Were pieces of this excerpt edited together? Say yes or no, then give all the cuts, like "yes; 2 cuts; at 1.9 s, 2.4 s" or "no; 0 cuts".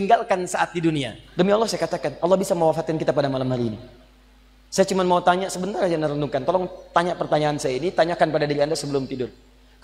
yes; 1 cut; at 1.2 s